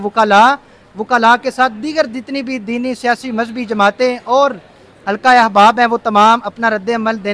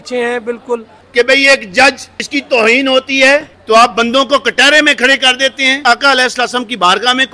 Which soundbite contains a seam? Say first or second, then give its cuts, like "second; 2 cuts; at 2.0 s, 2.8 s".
second; 4 cuts; at 1.0 s, 2.1 s, 3.5 s, 5.8 s